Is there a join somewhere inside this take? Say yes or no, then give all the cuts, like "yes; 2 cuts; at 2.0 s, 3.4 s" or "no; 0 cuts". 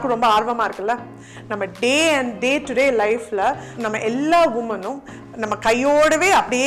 yes; 1 cut; at 3.7 s